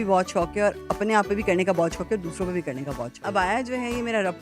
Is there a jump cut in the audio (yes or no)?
yes